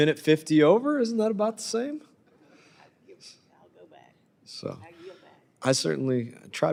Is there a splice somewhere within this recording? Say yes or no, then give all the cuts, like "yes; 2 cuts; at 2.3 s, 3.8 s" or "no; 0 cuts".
no; 0 cuts